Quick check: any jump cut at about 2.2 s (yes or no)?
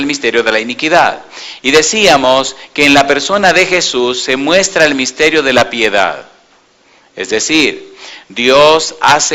no